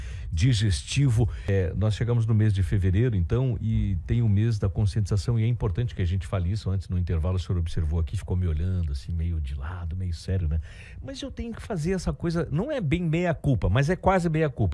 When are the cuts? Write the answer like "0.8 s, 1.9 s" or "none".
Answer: 1.5 s